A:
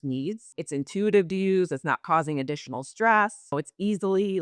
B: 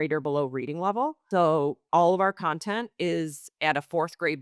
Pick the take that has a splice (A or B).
B